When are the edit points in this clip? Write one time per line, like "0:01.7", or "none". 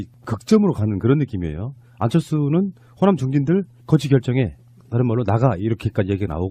0:03.5